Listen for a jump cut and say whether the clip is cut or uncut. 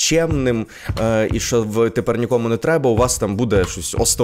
uncut